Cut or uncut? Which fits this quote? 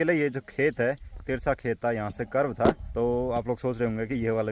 cut